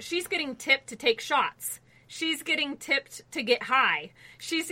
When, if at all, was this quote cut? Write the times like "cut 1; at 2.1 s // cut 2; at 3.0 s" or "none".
none